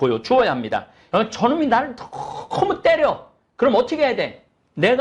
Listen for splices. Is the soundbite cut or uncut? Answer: cut